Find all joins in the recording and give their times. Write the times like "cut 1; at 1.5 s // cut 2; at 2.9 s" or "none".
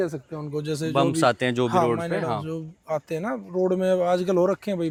none